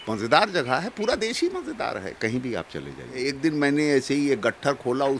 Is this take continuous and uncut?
no; 1 cut; at 3.3 s

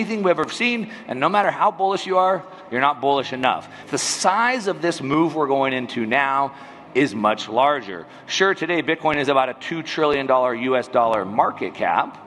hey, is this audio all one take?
no; 1 cut; at 3.8 s

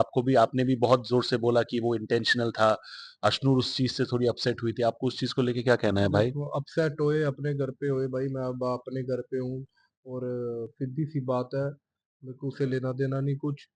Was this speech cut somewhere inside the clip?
no; 0 cuts

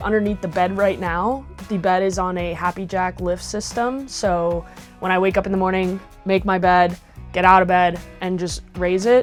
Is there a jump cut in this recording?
no; 0 cuts

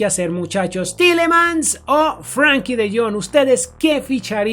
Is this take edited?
no; 0 cuts

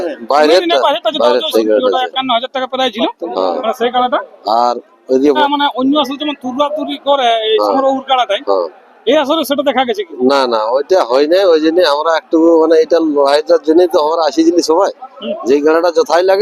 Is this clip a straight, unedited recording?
no; 2 cuts; at 1.5 s, 5.4 s

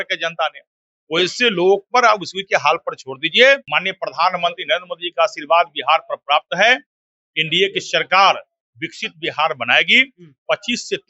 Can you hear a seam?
yes; 1 cut; at 3.7 s

